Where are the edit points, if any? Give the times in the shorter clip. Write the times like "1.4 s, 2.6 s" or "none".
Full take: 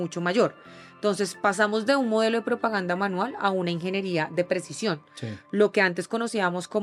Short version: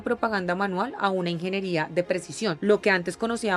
2.6 s